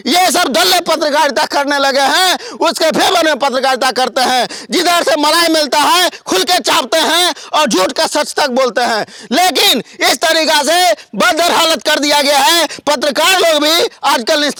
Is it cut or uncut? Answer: uncut